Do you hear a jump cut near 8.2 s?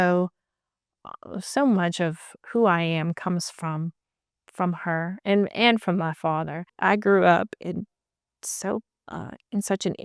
no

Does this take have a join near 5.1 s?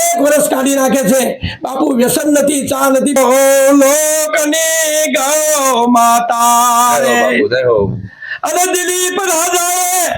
no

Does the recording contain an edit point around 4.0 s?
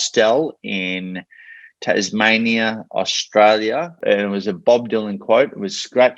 yes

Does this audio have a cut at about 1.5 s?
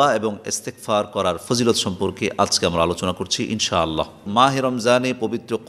no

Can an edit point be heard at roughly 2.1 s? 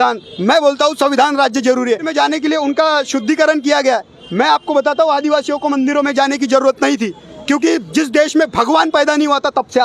yes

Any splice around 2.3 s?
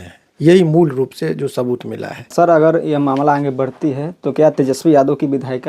yes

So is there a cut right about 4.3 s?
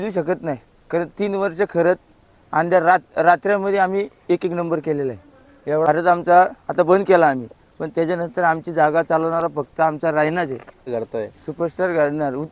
no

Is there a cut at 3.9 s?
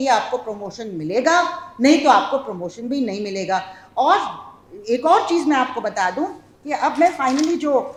no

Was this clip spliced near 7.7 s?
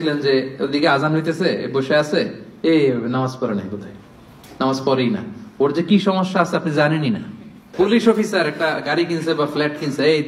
yes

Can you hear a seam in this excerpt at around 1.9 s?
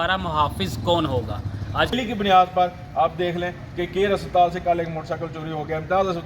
yes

